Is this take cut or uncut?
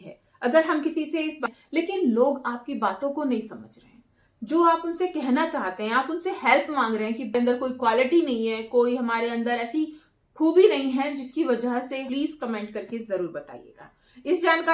cut